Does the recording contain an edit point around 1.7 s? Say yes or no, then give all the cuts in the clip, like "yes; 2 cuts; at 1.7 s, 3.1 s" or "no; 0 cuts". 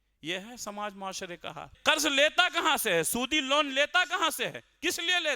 yes; 1 cut; at 1.7 s